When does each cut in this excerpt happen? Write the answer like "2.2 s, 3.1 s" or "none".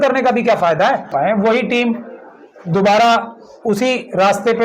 1.1 s